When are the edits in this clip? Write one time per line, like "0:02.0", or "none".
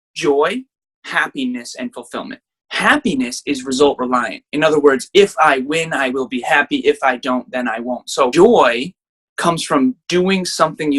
0:08.3